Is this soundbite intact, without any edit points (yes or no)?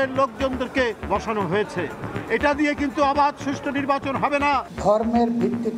no